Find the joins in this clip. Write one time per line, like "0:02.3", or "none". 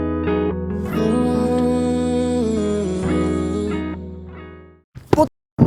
none

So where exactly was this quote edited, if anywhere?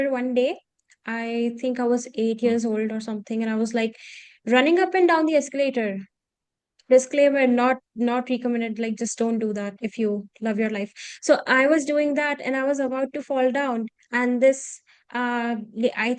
none

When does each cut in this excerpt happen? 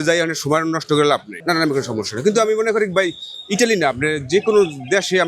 0:01.3

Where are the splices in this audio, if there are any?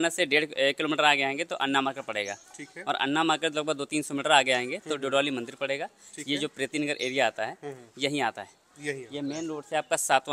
none

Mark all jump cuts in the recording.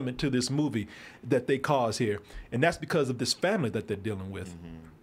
none

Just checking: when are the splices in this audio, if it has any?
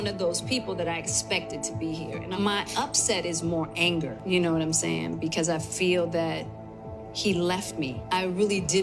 none

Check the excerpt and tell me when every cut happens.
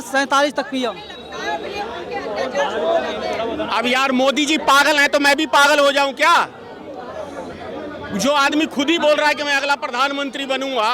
none

